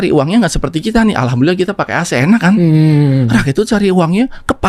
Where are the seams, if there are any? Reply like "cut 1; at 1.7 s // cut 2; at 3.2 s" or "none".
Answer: none

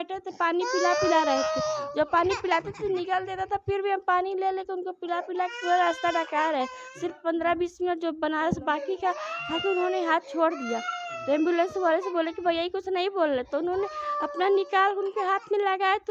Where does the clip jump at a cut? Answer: none

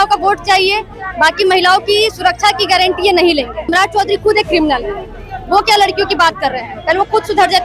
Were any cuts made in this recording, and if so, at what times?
cut 1; at 3.7 s

